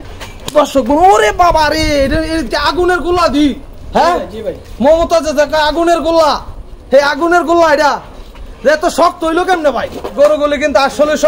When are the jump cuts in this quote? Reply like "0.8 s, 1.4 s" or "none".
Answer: 10.1 s